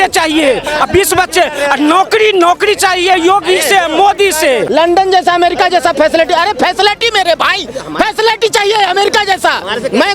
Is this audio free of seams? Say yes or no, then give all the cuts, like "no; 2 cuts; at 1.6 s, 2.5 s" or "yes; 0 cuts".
no; 1 cut; at 4.6 s